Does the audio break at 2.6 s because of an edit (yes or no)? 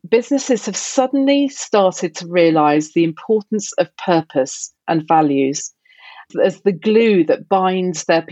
no